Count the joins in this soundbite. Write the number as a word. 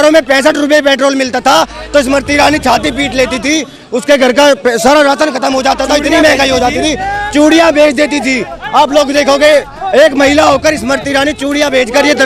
zero